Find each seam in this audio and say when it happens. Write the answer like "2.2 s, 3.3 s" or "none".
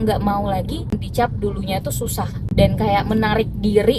0.9 s, 2.4 s